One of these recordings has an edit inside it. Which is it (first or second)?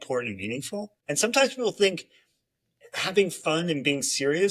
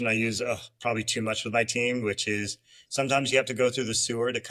first